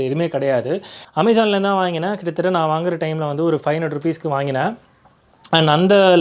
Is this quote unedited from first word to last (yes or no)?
no